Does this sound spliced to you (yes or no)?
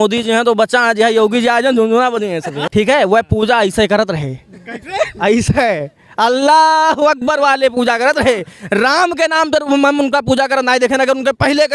yes